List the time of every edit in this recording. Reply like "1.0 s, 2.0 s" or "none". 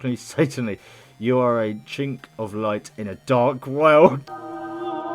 4.2 s